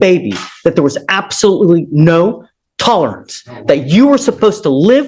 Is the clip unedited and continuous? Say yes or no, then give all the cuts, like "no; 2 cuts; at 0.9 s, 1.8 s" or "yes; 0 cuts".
yes; 0 cuts